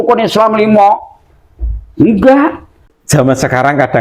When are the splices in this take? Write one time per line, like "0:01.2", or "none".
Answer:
0:02.7